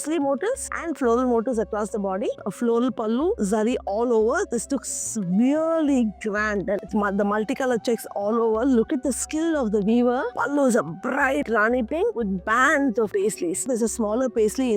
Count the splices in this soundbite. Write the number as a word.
four